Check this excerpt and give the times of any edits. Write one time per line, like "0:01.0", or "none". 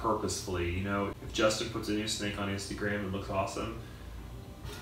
0:01.1